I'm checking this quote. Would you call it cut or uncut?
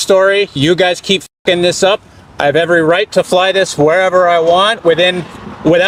uncut